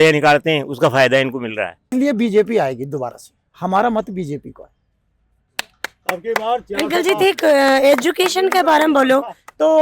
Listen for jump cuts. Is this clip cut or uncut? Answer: cut